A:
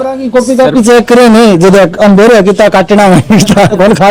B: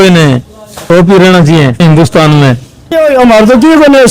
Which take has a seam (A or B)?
B